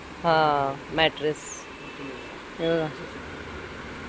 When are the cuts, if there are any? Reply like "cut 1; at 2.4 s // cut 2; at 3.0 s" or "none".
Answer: none